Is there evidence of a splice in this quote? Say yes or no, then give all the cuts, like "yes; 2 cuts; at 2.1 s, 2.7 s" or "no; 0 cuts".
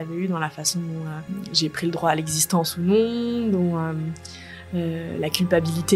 yes; 1 cut; at 1.3 s